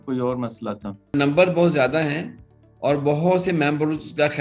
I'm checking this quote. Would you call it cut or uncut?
cut